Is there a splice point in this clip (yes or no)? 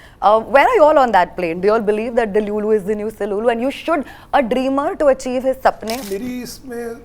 yes